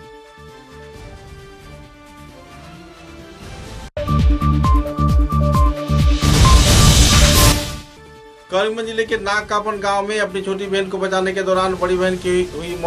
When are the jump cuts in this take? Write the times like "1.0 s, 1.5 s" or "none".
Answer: none